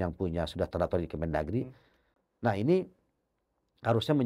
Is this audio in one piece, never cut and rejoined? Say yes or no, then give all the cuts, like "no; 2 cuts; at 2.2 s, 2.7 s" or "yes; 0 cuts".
yes; 0 cuts